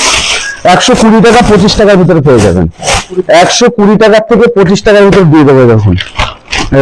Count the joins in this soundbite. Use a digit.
0